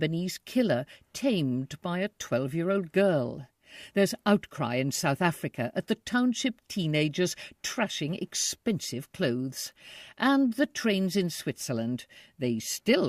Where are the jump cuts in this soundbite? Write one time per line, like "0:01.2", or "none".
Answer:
0:11.2